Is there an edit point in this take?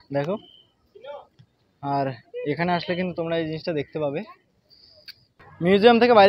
no; 0 cuts

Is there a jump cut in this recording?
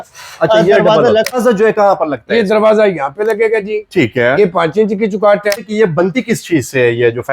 yes; 2 cuts; at 1.4 s, 5.6 s

